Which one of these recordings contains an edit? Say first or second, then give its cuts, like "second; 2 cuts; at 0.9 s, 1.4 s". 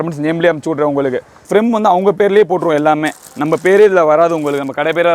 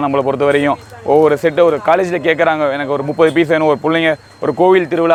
first; 1 cut; at 1.3 s